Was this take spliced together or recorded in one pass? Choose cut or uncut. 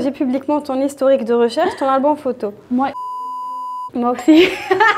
uncut